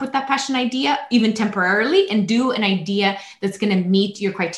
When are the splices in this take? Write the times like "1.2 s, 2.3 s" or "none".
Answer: none